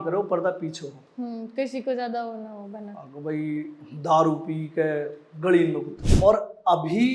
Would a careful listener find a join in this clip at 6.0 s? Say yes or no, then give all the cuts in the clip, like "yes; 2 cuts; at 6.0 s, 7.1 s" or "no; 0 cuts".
yes; 1 cut; at 6.0 s